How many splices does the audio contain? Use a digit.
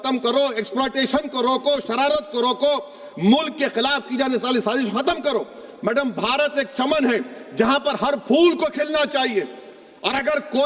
0